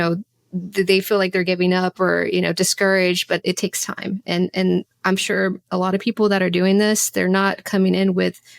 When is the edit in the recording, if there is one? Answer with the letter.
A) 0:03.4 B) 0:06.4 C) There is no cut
A